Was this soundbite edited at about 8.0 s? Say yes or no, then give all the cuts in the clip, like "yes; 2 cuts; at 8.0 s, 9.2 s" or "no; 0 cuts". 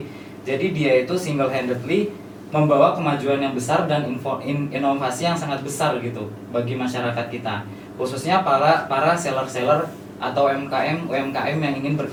no; 0 cuts